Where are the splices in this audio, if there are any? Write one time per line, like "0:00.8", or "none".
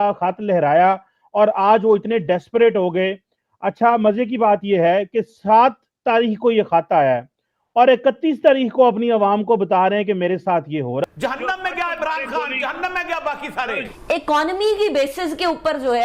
0:11.0
0:13.9